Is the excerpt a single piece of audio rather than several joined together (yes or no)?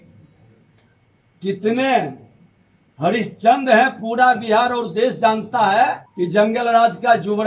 no